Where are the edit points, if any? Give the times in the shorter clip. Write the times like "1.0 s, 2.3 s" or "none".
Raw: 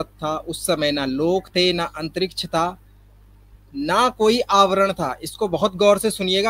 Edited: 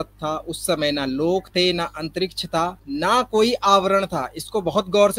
2.8 s